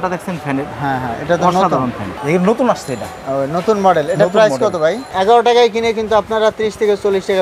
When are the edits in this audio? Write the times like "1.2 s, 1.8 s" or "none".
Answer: 2.1 s, 5.1 s